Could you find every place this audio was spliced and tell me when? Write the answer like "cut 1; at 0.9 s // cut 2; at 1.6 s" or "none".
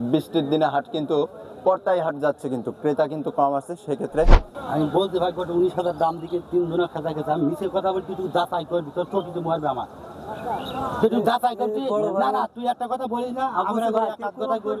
cut 1; at 4.5 s